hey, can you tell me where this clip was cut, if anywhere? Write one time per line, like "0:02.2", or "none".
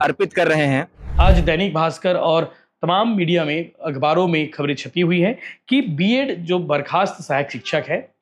0:01.0

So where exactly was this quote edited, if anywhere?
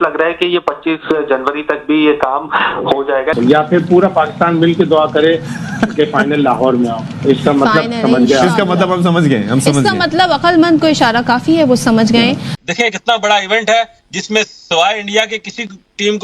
0:03.3

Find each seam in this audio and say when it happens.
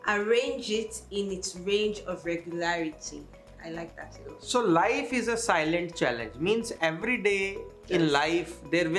none

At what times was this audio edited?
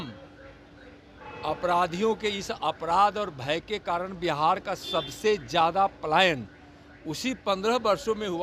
none

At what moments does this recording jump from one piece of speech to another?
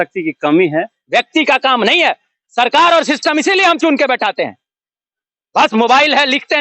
0:01.0

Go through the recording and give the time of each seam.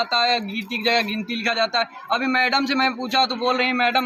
none

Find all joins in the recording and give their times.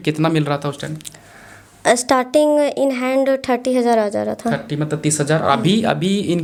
none

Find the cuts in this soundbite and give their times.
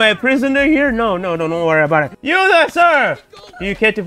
0:02.2

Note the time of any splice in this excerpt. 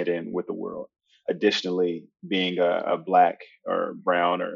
0:01.2

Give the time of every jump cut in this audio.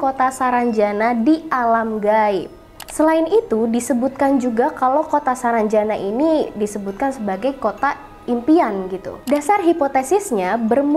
none

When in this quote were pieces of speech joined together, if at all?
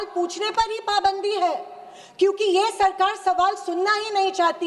none

